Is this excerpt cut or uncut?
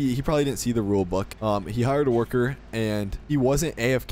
cut